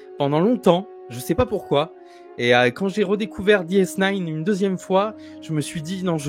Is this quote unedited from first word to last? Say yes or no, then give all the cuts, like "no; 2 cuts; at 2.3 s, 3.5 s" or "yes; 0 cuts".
yes; 0 cuts